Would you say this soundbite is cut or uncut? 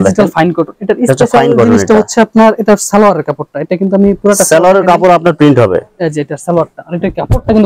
uncut